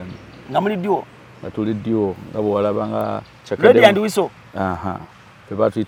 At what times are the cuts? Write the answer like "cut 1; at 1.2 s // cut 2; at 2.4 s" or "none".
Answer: none